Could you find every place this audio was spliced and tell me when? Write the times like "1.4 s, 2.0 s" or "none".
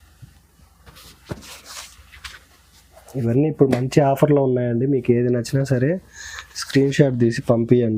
none

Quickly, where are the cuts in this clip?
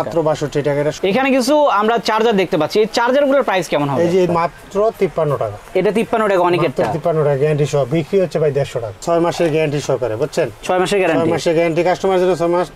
1.0 s, 4.3 s, 9.0 s

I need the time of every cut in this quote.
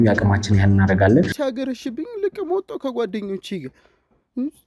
1.3 s

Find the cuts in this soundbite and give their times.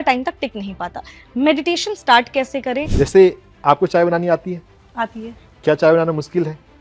2.9 s

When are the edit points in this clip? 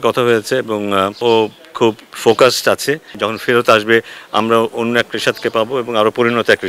1.2 s, 3.2 s

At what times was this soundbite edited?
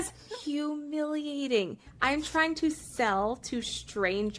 1.8 s

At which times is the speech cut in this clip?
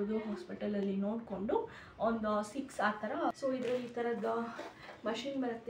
3.3 s

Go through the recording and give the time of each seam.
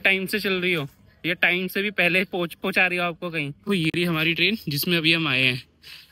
3.6 s

